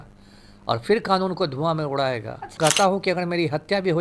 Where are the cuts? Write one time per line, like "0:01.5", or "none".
0:02.6

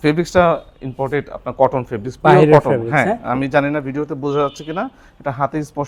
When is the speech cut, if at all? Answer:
none

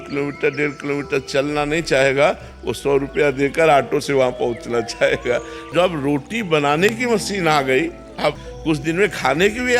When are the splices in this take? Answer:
0:05.7
0:08.5

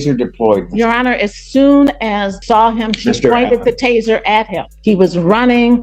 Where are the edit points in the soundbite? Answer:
0:02.3
0:04.7

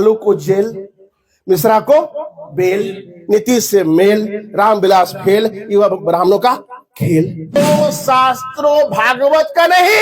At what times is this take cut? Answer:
0:07.6

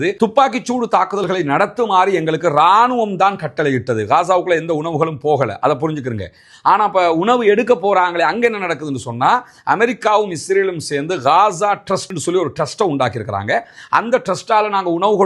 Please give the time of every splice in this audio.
none

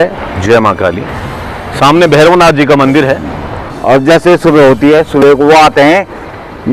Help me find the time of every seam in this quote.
0:03.7

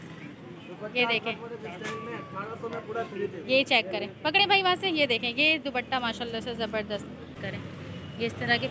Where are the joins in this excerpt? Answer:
0:07.4

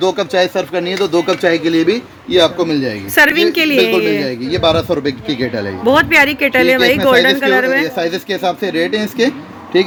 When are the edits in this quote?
none

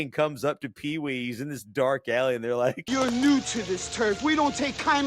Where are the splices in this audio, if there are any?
0:02.8

